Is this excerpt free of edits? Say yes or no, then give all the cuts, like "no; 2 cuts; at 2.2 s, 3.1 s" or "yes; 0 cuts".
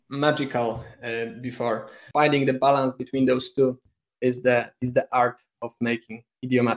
no; 1 cut; at 2.0 s